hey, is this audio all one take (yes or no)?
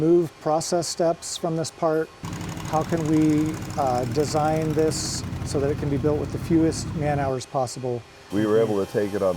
no